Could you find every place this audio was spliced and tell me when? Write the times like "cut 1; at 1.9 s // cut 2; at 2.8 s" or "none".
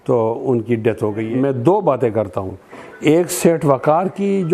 cut 1; at 1.2 s